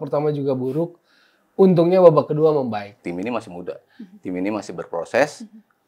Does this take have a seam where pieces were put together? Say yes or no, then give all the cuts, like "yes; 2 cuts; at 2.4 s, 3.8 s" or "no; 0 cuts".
yes; 1 cut; at 2.9 s